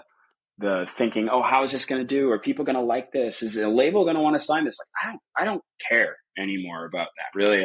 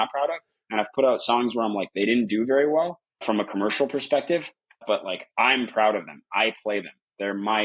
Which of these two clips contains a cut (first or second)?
second